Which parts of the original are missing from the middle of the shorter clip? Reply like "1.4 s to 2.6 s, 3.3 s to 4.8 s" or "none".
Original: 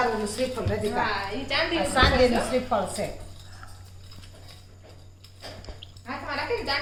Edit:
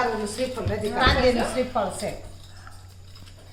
1.0 s to 1.9 s